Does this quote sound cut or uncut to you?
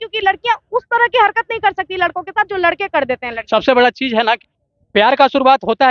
cut